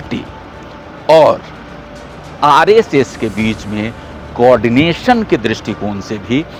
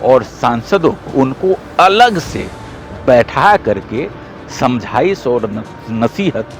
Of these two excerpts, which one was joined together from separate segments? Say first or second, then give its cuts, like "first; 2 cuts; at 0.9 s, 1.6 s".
second; 1 cut; at 1.1 s